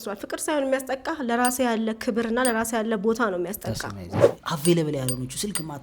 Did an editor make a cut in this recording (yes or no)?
yes